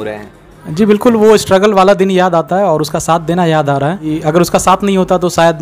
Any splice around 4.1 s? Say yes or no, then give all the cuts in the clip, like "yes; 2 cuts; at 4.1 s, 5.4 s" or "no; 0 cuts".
yes; 1 cut; at 4.1 s